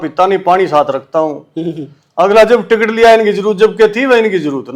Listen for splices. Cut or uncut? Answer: uncut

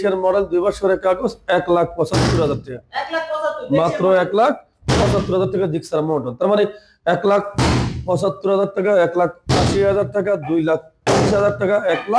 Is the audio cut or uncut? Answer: uncut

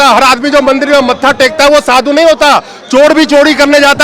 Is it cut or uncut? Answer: uncut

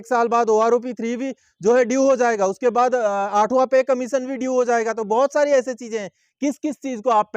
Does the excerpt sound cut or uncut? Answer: uncut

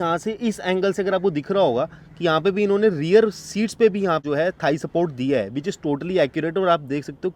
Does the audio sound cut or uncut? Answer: cut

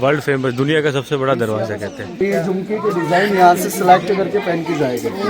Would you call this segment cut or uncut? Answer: cut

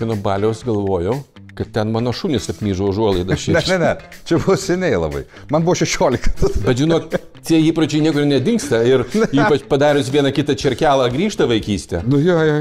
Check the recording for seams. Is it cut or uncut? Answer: cut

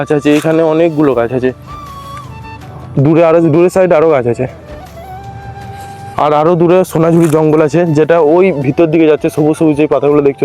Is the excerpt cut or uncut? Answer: uncut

